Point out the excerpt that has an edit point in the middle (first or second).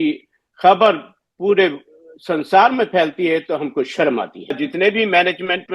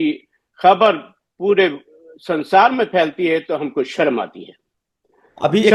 first